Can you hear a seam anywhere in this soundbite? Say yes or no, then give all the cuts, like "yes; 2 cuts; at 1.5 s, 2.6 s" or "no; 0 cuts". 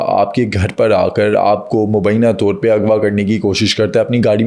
no; 0 cuts